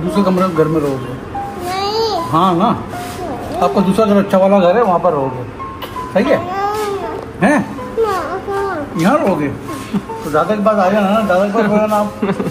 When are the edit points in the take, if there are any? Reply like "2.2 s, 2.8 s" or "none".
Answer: none